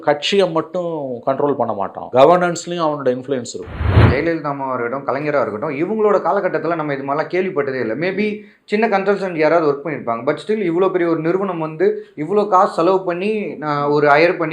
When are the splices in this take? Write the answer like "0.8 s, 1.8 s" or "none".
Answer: 2.0 s, 4.0 s